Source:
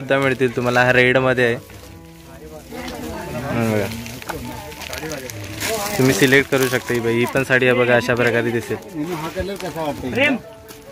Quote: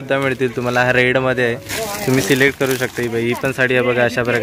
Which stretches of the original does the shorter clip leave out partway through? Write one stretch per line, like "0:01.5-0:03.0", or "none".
0:01.7-0:05.6